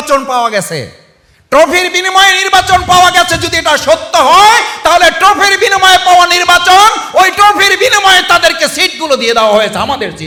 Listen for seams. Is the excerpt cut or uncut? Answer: uncut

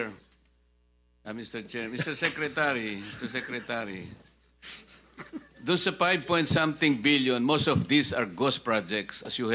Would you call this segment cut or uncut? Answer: uncut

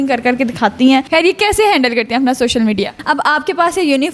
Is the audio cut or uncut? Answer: cut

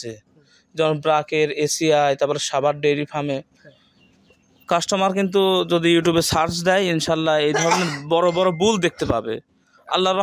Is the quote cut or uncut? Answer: uncut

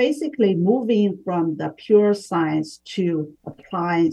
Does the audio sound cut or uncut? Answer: uncut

